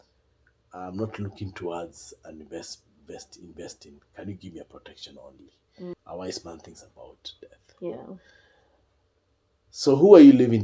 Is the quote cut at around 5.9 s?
yes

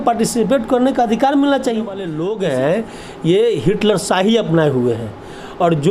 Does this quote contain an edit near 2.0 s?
yes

